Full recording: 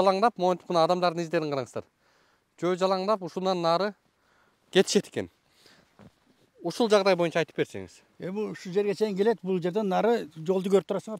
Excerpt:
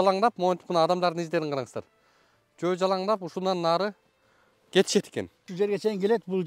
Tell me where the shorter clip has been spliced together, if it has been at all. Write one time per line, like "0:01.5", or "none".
0:05.4